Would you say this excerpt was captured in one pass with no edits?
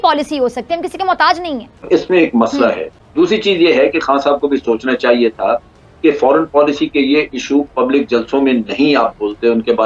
no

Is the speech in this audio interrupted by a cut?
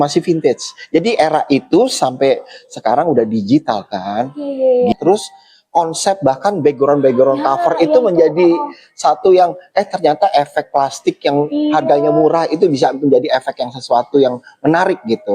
yes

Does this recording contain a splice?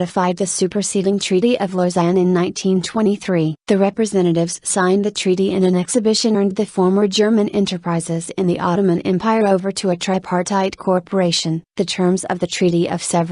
no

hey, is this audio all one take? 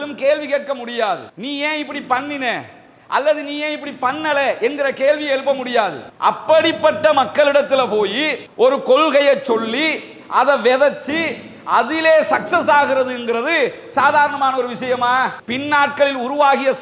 no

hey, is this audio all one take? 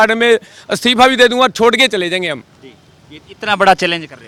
yes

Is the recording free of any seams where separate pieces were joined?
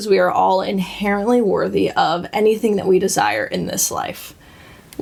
yes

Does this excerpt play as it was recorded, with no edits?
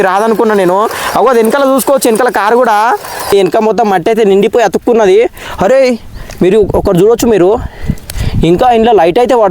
no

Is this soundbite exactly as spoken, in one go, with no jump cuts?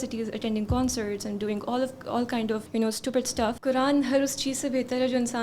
no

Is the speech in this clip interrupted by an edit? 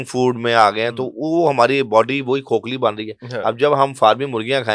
no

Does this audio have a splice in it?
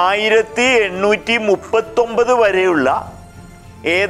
no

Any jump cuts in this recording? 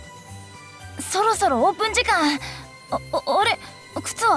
yes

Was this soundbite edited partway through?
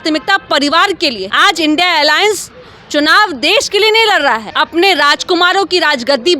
yes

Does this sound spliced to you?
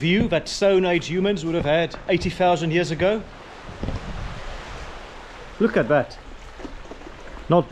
no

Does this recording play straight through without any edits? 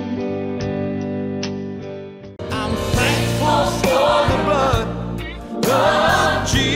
no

